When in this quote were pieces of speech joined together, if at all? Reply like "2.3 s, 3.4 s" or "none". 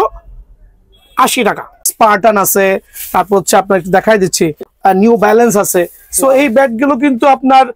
1.7 s, 4.7 s